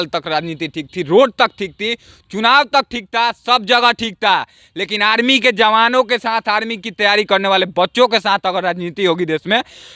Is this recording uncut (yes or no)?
yes